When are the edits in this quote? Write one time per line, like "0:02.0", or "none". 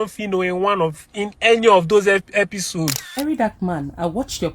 0:03.1